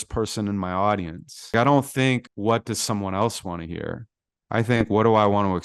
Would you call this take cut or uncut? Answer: cut